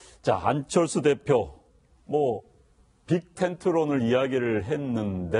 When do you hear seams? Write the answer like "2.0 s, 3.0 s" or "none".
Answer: none